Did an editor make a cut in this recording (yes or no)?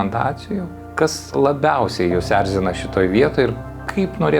yes